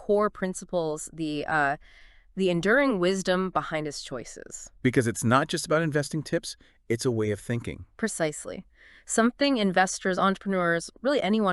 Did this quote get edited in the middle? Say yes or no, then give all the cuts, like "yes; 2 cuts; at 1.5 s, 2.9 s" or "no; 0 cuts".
no; 0 cuts